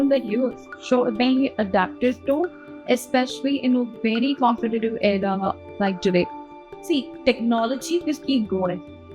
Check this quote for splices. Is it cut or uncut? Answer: uncut